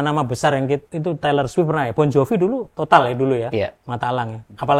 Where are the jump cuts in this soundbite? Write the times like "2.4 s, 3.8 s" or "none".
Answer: 0.9 s